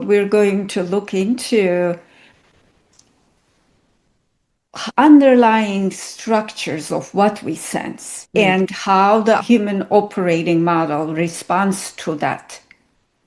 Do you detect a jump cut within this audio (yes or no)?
no